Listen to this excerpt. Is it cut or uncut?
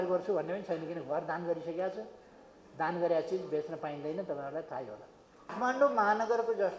cut